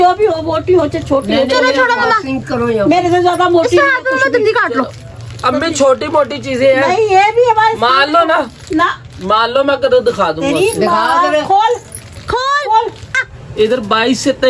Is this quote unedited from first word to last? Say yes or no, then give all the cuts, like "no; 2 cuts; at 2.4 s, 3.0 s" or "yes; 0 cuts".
no; 2 cuts; at 11.9 s, 13.2 s